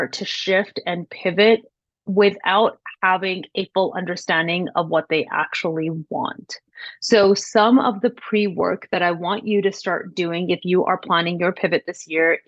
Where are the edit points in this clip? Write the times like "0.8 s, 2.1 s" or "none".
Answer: none